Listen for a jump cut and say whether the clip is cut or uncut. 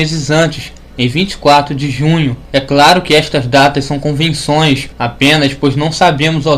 cut